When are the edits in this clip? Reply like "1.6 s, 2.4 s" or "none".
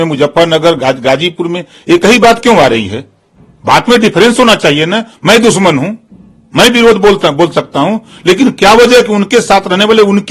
none